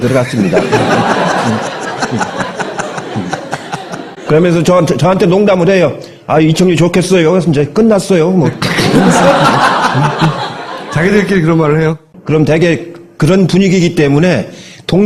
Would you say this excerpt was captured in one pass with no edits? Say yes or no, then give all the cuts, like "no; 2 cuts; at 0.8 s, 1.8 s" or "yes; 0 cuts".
no; 1 cut; at 5.8 s